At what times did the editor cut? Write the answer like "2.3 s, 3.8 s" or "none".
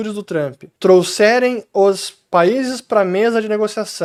none